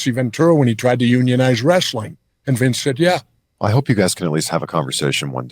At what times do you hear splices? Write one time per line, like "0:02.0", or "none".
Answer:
0:03.4